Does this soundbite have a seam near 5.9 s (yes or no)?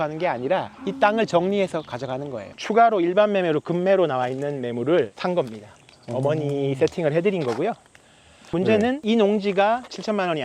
no